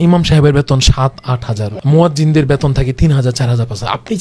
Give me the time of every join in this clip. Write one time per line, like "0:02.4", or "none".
0:01.7